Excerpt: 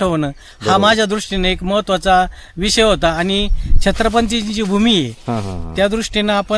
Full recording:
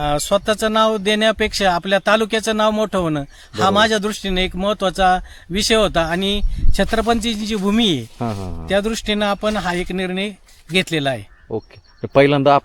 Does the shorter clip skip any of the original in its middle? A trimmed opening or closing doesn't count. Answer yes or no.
no